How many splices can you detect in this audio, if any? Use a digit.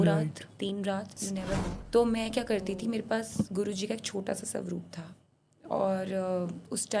1